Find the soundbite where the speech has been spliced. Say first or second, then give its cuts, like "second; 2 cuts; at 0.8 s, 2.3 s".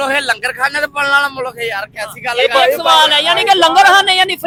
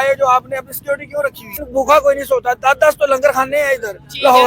second; 1 cut; at 1.6 s